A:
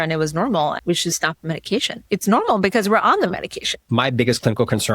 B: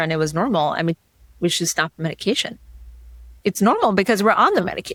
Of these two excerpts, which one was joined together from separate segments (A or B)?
A